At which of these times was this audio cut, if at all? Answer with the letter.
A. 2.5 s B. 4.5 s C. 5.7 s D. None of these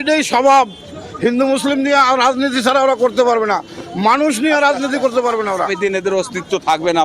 C